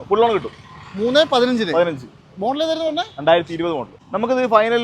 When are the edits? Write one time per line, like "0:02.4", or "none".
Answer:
0:03.9